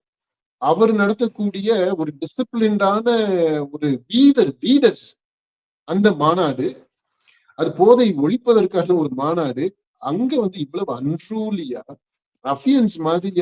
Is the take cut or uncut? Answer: uncut